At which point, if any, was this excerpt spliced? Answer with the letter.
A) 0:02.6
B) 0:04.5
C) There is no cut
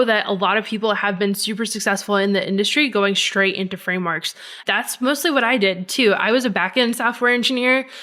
B